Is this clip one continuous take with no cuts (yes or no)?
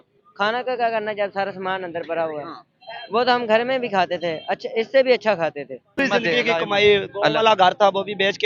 no